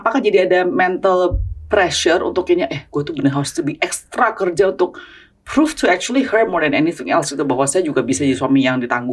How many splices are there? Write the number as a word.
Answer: zero